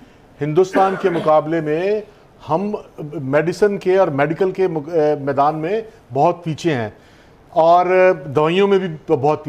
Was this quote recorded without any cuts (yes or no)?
yes